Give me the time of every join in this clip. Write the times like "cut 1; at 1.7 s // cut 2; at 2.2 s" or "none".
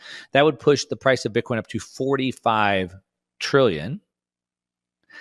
none